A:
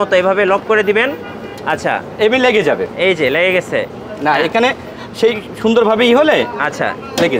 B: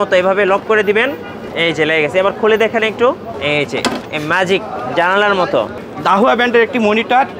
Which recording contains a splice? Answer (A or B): B